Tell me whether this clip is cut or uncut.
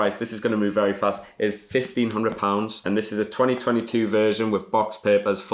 uncut